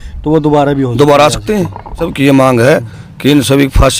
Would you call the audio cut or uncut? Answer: cut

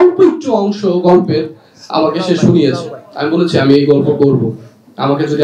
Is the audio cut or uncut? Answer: uncut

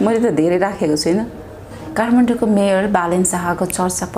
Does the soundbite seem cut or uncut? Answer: cut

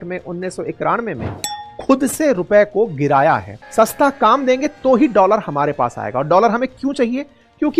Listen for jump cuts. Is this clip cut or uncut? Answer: cut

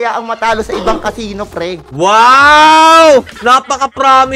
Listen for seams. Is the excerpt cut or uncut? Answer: cut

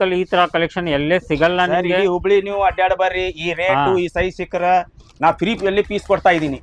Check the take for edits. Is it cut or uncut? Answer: uncut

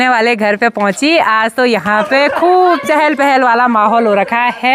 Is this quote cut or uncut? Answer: uncut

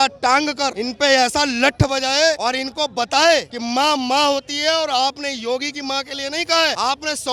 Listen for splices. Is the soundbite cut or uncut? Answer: uncut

